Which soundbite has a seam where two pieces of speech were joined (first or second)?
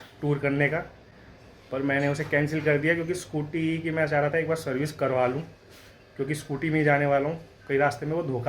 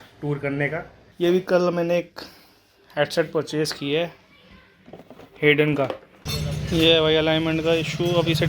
second